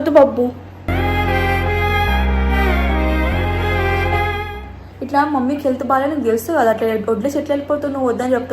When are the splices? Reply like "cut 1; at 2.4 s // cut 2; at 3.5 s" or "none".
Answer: none